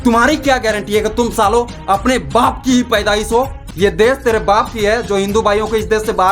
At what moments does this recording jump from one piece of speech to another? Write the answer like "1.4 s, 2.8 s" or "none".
3.6 s